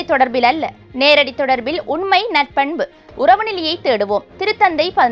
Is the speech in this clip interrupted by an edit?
no; 0 cuts

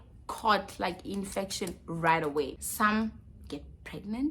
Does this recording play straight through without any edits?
no; 1 cut; at 2.6 s

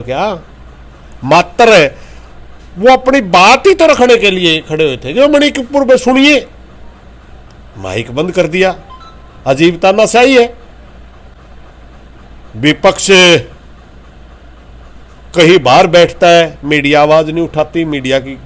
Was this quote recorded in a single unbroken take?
yes; 0 cuts

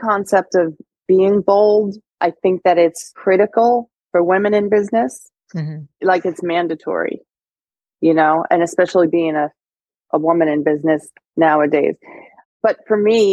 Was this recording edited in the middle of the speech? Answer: yes; 5 cuts; at 2.1 s, 3.1 s, 5.9 s, 9.1 s, 12.5 s

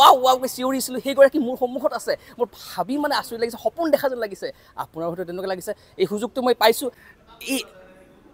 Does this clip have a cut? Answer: yes; 1 cut; at 6.8 s

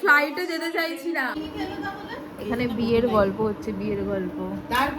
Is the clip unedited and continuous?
no; 1 cut; at 1.3 s

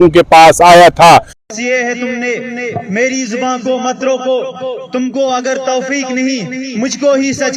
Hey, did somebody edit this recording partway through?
yes; 1 cut; at 1.3 s

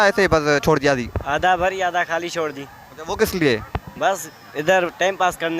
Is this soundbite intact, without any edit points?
no; 1 cut; at 2.8 s

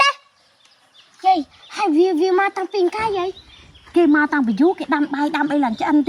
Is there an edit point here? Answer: no; 0 cuts

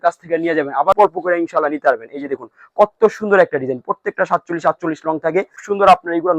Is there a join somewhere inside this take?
yes; 2 cuts; at 1.0 s, 5.5 s

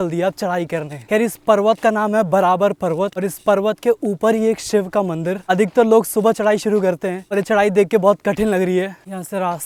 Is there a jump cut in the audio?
no; 0 cuts

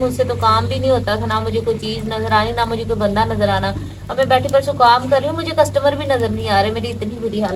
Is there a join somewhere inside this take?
no; 0 cuts

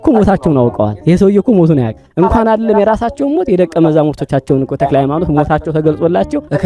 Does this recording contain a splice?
no; 0 cuts

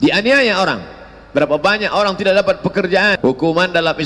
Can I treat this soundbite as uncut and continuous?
no; 1 cut; at 3.2 s

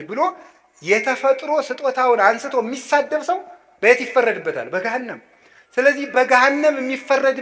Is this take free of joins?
yes; 0 cuts

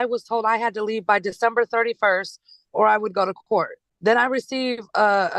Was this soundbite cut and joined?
yes; 1 cut; at 3.8 s

